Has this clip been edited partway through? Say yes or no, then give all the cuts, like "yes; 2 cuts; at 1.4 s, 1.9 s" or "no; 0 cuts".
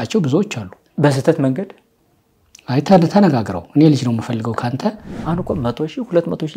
yes; 1 cut; at 5.1 s